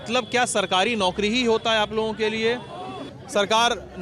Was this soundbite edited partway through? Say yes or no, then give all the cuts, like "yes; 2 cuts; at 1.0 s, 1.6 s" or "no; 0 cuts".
yes; 1 cut; at 3.0 s